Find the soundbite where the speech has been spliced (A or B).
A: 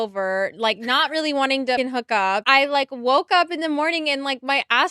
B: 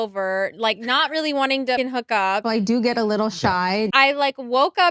B